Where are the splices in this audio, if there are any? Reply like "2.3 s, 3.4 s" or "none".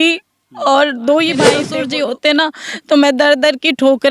1.7 s